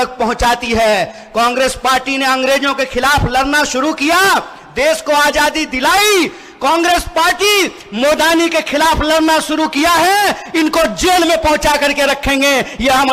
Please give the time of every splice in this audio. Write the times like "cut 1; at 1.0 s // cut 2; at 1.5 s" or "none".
none